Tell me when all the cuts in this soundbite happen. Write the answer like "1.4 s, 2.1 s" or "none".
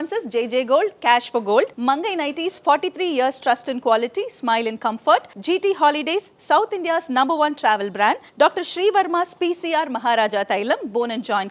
none